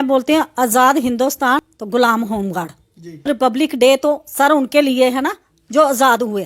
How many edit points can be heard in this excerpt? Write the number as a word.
two